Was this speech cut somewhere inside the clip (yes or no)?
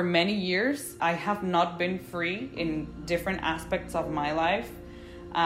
yes